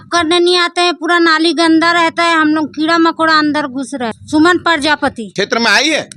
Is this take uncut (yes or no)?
no